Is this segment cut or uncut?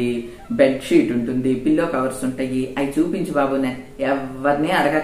uncut